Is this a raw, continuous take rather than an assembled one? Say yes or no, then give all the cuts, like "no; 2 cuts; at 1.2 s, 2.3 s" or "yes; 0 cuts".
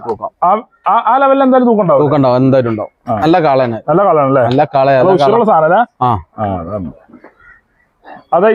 yes; 0 cuts